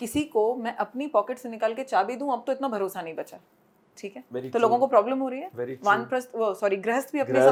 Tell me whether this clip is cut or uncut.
uncut